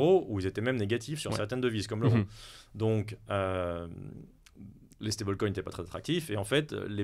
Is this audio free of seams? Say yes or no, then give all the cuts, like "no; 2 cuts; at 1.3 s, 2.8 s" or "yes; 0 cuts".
yes; 0 cuts